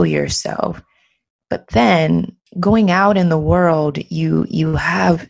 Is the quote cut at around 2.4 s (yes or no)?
yes